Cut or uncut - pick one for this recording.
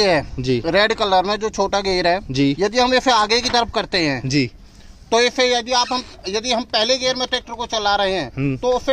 uncut